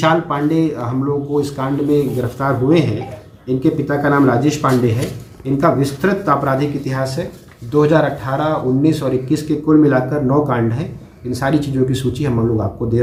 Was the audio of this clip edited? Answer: no; 0 cuts

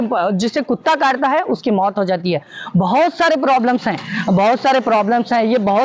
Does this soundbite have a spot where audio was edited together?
no; 0 cuts

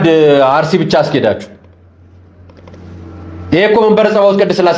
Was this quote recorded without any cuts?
yes; 0 cuts

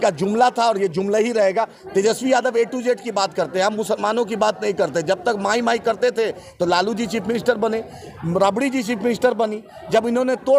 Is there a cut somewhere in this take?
yes; 1 cut; at 1.8 s

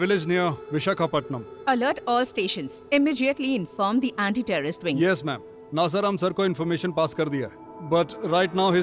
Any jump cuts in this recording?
no; 0 cuts

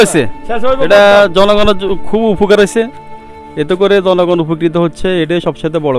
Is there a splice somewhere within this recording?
no; 0 cuts

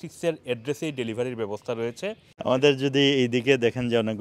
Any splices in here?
yes; 1 cut; at 2.3 s

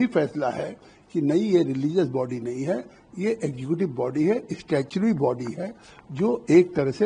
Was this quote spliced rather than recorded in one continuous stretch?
no; 0 cuts

